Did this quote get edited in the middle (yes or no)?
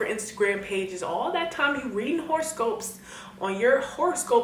no